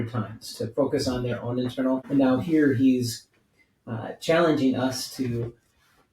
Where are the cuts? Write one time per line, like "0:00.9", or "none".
0:02.0